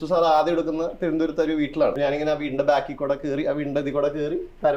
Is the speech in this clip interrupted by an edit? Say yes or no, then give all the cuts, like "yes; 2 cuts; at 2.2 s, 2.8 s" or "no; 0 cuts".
yes; 1 cut; at 2.0 s